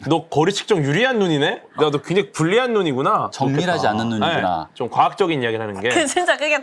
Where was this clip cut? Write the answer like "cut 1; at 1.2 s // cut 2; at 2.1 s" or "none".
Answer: none